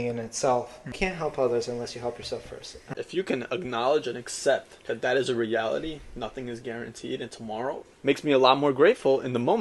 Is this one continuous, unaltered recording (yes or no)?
no